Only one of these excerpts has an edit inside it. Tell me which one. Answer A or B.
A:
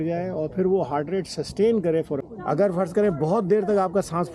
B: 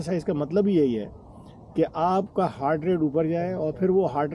A